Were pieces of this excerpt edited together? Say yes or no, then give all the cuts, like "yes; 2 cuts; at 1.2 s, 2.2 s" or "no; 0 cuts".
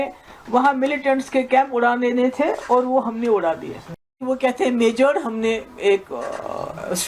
yes; 1 cut; at 4.2 s